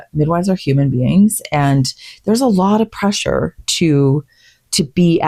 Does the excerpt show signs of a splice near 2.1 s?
no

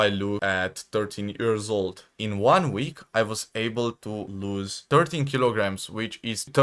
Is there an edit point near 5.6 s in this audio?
no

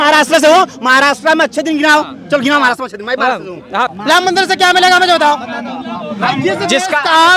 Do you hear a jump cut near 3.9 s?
yes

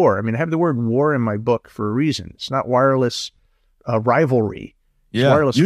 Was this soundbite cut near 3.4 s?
no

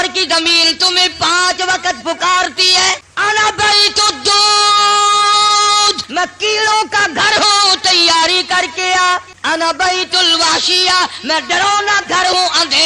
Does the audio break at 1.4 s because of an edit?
no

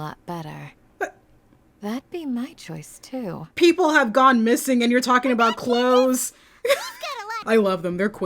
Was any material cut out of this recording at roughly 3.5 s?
no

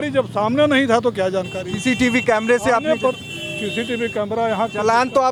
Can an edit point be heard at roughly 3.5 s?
no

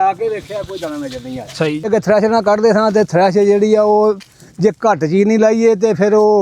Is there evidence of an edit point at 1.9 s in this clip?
yes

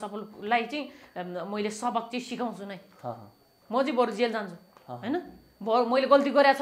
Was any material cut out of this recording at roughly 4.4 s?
no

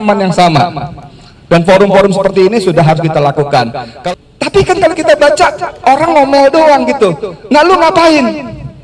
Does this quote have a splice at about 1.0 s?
no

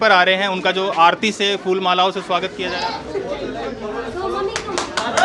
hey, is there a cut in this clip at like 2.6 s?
yes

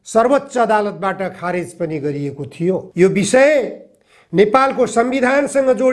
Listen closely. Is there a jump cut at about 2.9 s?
yes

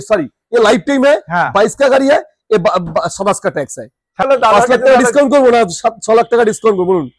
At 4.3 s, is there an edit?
yes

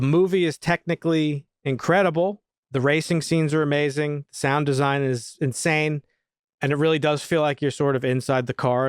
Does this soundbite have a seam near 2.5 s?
yes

